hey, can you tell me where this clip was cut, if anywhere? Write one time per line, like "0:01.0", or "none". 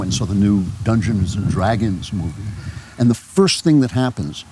none